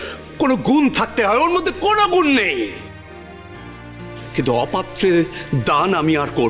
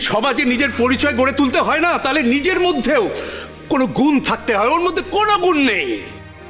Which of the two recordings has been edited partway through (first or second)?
first